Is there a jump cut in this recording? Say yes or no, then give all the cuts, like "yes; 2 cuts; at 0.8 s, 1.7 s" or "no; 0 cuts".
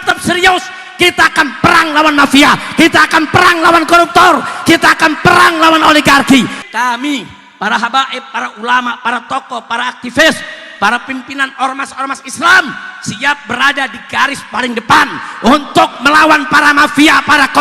yes; 1 cut; at 6.6 s